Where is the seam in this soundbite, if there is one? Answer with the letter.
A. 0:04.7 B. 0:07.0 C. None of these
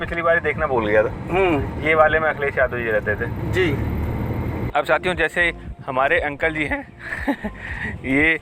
A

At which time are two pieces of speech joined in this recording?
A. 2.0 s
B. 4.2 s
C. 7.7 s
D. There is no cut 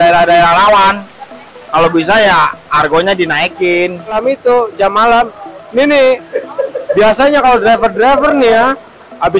B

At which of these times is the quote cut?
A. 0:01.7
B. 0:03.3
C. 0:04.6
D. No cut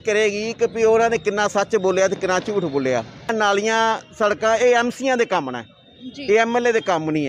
B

